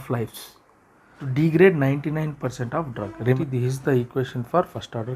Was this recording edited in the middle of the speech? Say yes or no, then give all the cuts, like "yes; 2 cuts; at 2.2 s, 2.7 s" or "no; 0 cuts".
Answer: yes; 2 cuts; at 1.2 s, 3.4 s